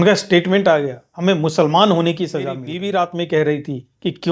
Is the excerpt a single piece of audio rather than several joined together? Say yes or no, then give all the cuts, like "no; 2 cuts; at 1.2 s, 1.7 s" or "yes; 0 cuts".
no; 1 cut; at 2.7 s